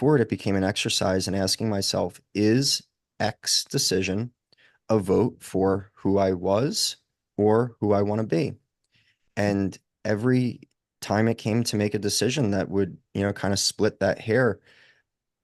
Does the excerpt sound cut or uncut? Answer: uncut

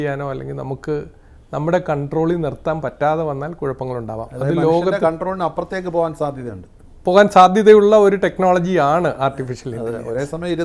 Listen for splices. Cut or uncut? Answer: uncut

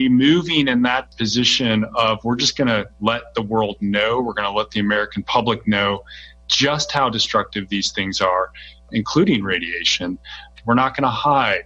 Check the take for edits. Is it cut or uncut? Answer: cut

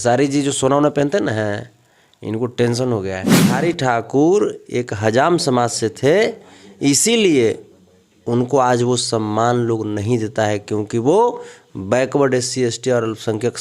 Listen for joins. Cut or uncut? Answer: cut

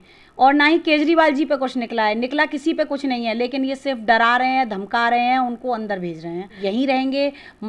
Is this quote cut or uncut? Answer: cut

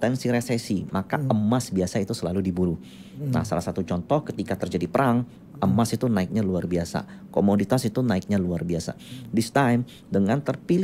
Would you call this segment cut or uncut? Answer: uncut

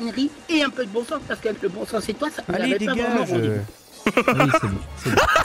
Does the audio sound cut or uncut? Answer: uncut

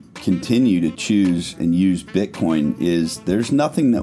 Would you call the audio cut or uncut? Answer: uncut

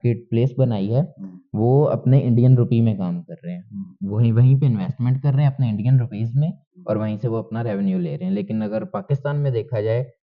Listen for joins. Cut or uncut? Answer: uncut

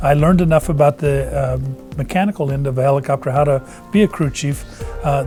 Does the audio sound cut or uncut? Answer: uncut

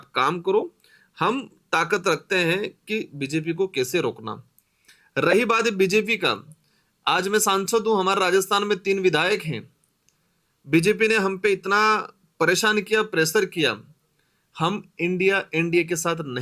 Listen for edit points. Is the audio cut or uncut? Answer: uncut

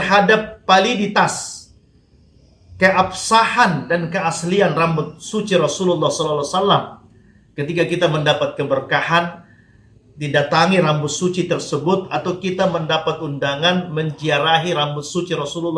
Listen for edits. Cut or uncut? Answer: uncut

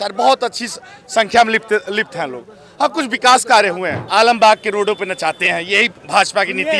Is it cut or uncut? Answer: cut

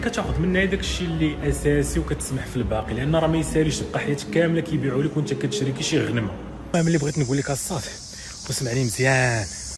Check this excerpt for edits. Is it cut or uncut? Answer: cut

